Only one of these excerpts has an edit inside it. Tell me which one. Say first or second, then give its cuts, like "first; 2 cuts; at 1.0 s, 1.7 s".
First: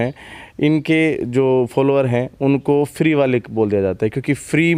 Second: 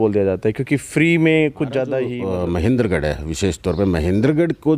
second; 1 cut; at 2.1 s